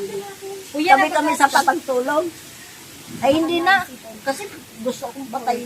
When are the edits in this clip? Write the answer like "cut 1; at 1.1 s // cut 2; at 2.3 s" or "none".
cut 1; at 1.6 s